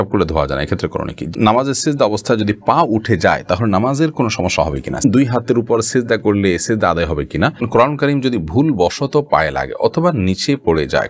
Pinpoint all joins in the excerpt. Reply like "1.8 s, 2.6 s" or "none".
1.3 s, 5.0 s, 7.7 s